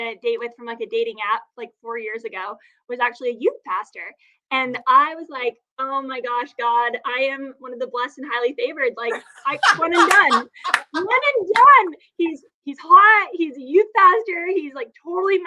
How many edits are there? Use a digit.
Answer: 0